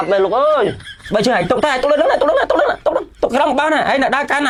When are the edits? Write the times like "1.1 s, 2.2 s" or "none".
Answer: none